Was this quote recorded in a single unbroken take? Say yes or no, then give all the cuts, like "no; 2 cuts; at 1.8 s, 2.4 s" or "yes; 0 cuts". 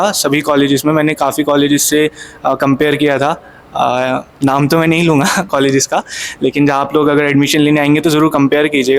no; 1 cut; at 6.2 s